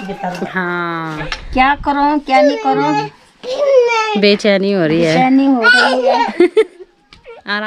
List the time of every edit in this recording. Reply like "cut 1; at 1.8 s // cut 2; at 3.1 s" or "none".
cut 1; at 1.2 s